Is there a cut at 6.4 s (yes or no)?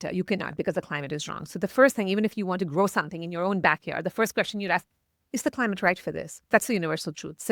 yes